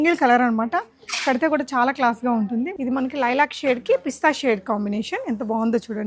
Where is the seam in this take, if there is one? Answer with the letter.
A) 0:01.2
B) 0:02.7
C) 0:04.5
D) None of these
B